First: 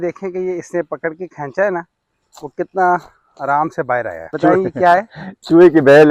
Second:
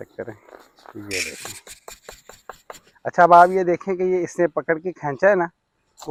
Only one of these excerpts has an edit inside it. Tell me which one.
first; 1 cut; at 4.3 s

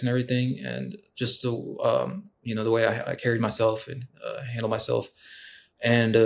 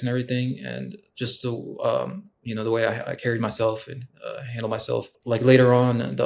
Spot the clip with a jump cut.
second; 1 cut; at 5.1 s

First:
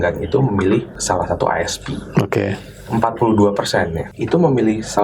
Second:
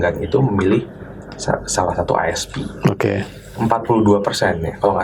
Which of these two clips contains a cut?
first; 2 cuts; at 1.0 s, 4.0 s

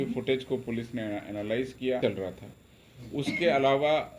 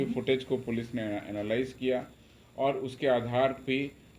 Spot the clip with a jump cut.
first; 1 cut; at 2.0 s

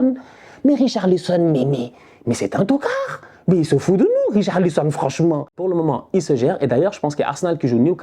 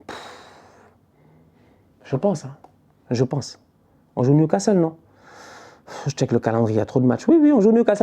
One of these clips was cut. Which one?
first; 1 cut; at 5.6 s

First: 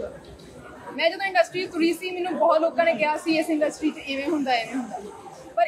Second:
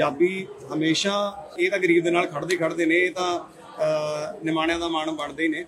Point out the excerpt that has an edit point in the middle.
second; 1 cut; at 1.5 s

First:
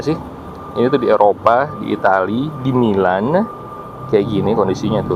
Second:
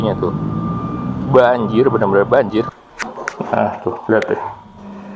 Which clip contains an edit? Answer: second; 1 cut; at 2.7 s

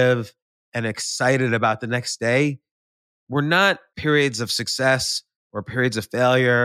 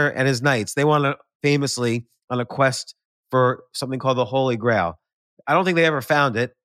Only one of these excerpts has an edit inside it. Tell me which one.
first; 1 cut; at 3.9 s

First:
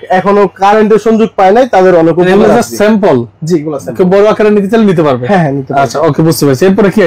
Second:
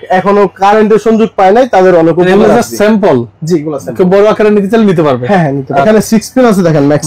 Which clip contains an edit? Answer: second; 1 cut; at 5.8 s

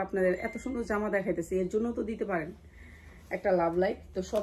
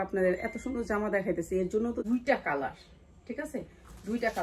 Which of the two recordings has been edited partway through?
second; 1 cut; at 2.0 s

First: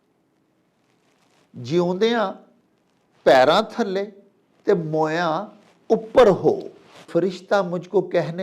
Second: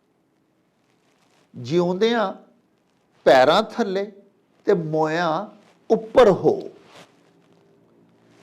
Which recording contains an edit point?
first; 1 cut; at 7.1 s

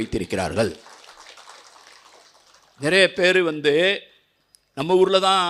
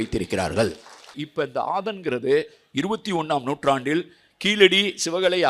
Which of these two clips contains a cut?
second; 1 cut; at 1.2 s

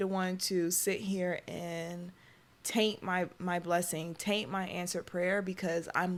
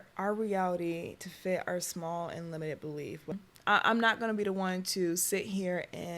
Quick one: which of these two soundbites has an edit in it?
second; 1 cut; at 3.3 s

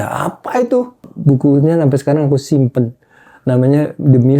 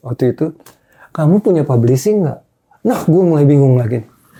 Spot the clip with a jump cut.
first; 1 cut; at 1.1 s

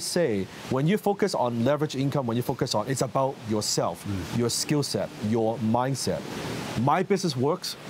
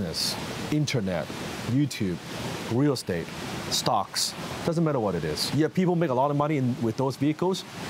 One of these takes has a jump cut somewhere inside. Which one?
second; 1 cut; at 5.5 s

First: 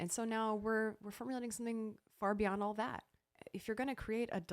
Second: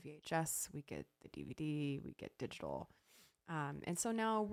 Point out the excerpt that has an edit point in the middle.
first; 1 cut; at 3.3 s

